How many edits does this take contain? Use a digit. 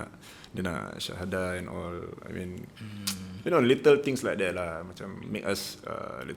0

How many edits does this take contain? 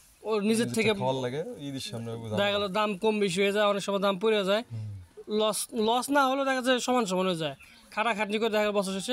0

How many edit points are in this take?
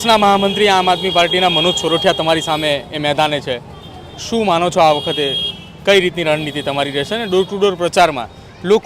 0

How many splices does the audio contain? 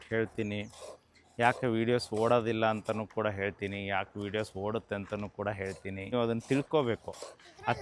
1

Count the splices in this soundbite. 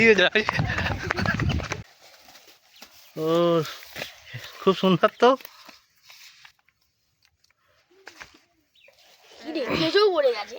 1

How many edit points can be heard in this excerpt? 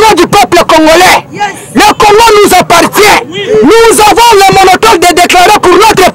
0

